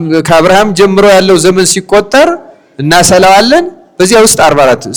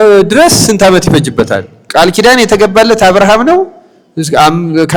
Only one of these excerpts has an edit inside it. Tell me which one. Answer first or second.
second